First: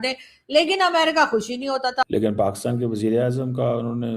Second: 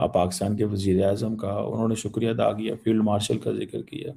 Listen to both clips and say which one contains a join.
first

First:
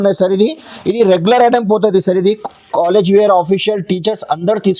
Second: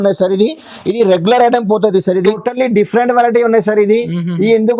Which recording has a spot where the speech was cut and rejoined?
second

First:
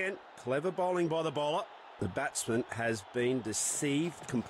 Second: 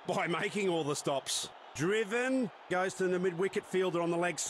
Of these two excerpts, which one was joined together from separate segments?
second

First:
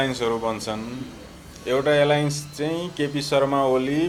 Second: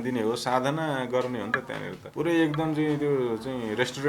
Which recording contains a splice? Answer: second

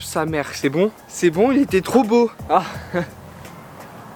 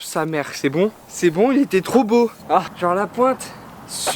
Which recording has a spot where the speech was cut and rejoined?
second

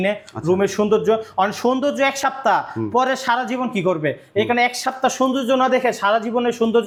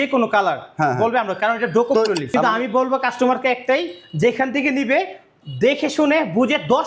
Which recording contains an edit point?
second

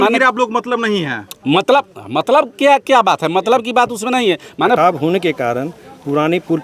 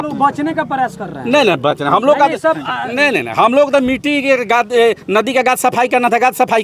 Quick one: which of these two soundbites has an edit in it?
first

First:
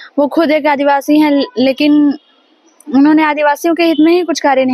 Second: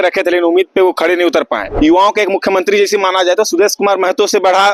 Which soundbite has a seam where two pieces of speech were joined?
second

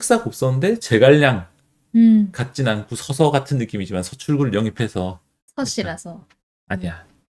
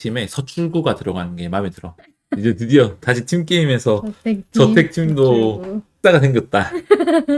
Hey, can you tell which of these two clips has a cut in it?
second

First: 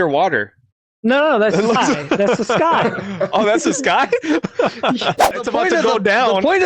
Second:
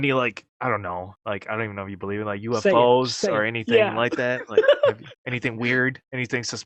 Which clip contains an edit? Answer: first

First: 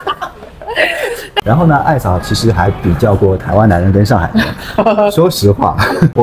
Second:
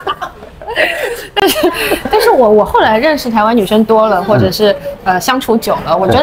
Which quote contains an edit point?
first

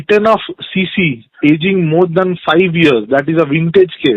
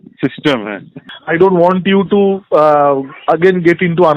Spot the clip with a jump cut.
second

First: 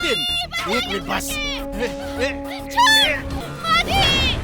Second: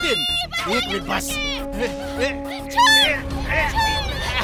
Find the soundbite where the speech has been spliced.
first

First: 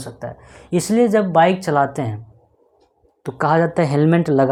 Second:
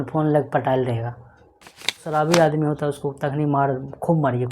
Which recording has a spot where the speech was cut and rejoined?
second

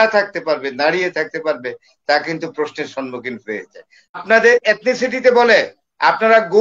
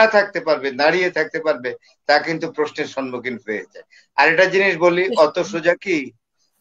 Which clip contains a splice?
first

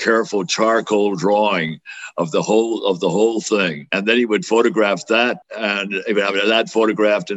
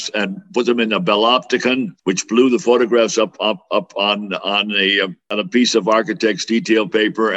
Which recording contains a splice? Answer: first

